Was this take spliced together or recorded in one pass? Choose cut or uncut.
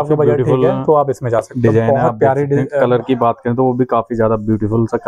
uncut